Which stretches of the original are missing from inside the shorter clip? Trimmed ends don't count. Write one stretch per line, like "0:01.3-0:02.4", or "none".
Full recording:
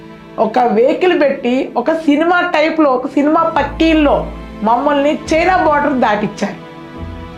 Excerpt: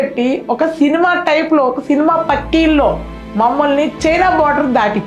none